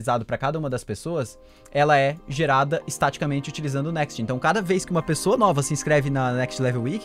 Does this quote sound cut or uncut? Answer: uncut